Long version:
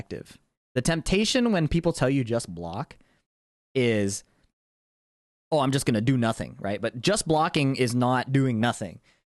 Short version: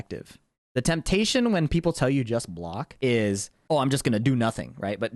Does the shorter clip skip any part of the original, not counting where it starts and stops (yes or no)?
yes